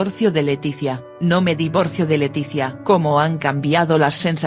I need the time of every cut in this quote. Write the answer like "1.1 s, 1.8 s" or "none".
1.0 s